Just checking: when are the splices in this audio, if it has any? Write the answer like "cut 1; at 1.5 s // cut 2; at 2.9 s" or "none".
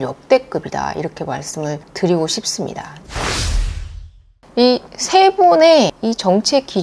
cut 1; at 3.1 s // cut 2; at 4.5 s